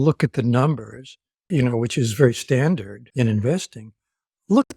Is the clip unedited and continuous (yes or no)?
no